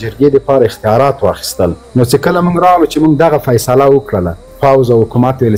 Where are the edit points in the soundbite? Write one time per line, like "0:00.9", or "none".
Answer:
0:01.8
0:04.4